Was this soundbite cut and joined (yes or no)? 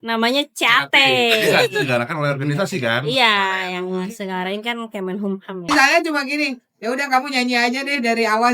yes